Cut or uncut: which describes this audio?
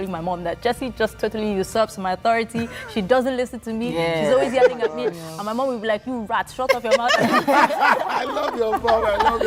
uncut